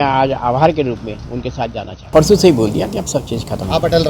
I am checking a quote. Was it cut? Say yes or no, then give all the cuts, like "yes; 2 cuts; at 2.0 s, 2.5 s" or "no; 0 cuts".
yes; 1 cut; at 2.1 s